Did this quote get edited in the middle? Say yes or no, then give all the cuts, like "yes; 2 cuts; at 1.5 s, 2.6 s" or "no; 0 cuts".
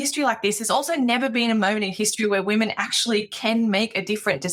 no; 0 cuts